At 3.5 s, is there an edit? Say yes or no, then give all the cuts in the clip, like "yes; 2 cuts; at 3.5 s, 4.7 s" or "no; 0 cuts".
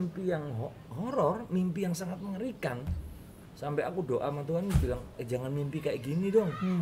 no; 1 cut; at 5.1 s